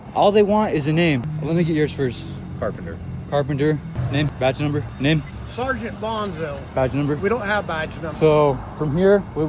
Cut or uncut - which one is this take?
uncut